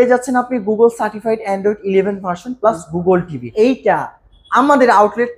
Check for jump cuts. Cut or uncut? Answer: cut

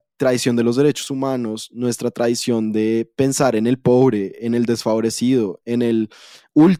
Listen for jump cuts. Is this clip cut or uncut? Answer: uncut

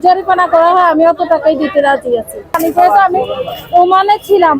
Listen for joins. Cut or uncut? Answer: cut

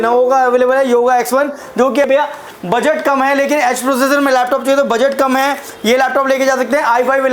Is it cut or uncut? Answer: cut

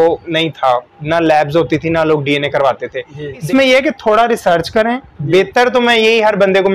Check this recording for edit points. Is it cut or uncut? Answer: cut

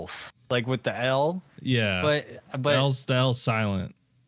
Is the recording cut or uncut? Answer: uncut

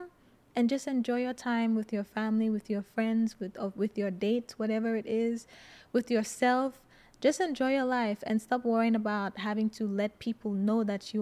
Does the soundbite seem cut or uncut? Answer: uncut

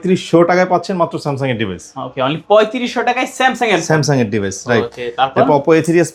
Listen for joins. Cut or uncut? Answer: uncut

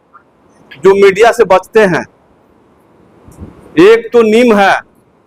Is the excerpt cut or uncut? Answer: uncut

